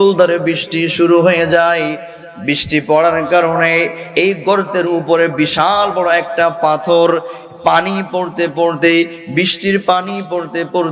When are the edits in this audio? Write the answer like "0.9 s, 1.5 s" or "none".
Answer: none